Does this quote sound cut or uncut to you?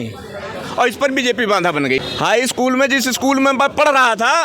cut